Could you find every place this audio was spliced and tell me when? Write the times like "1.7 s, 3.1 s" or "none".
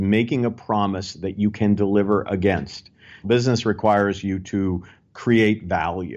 3.2 s